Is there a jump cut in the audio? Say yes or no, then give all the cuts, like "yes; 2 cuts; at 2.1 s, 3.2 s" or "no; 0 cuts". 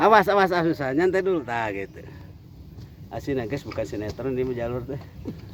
no; 0 cuts